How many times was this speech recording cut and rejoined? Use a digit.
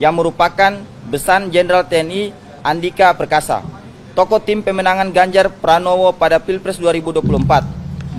0